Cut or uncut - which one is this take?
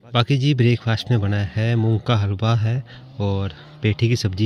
uncut